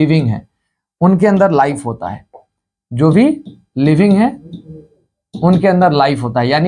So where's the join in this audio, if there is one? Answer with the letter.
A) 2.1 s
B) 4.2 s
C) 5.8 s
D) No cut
D